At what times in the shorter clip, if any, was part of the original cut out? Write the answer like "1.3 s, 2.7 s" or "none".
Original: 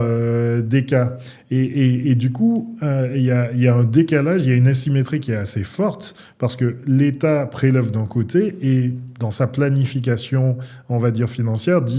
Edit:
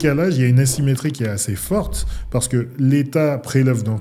none

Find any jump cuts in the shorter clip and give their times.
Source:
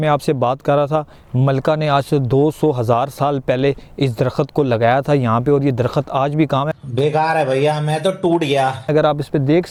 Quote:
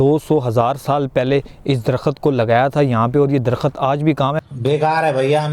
none

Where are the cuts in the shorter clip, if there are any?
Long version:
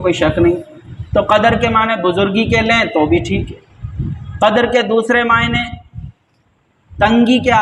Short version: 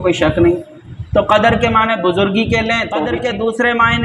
3.0 s

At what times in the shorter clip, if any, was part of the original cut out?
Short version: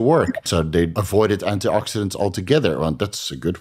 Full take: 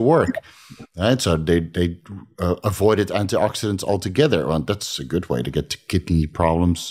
0.9 s

